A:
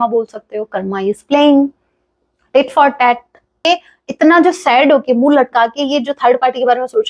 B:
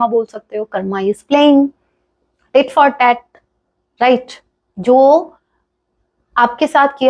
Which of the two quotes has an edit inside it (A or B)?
A